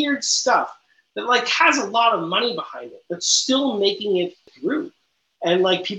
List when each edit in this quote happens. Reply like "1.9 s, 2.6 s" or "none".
4.5 s